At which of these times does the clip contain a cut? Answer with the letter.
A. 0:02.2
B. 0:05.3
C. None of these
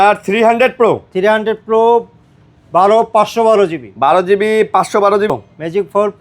B